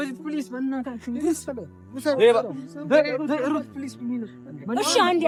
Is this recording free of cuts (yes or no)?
yes